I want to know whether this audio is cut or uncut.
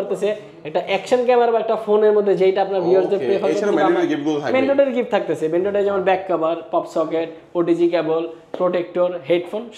uncut